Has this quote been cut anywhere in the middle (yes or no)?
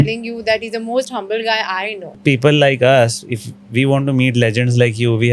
yes